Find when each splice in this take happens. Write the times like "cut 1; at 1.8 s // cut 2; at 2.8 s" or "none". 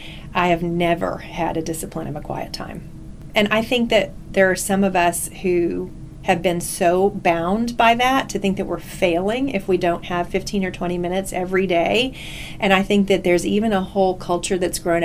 cut 1; at 3.2 s